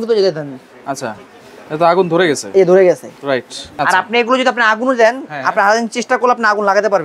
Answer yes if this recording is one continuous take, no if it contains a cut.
no